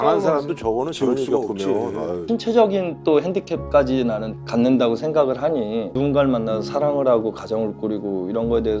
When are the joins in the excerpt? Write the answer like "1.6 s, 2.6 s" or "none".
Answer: 2.2 s, 5.9 s